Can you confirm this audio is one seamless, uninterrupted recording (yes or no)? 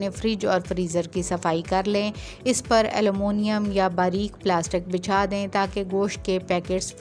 yes